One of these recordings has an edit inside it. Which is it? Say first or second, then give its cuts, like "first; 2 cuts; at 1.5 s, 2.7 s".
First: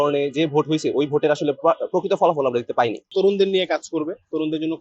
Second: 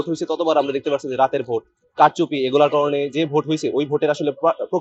first; 1 cut; at 3.1 s